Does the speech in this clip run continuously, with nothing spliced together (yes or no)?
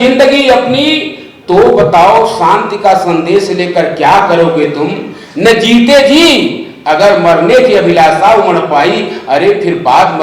yes